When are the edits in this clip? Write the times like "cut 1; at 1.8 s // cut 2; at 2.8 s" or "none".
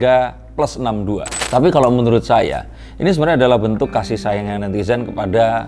cut 1; at 1.3 s